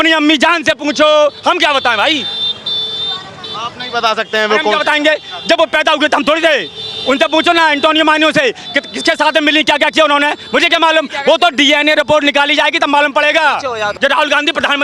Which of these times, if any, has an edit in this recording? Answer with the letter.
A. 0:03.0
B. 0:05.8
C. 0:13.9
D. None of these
C